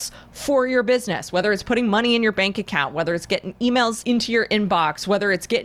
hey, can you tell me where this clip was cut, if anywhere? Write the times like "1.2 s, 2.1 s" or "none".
4.0 s